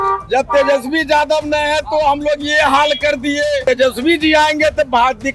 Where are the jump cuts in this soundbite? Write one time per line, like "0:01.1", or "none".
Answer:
0:03.6